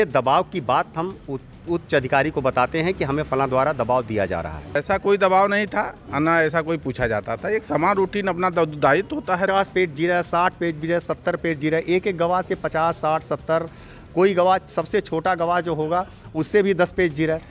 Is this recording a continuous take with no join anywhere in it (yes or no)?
no